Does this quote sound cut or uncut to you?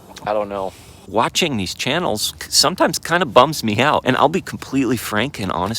cut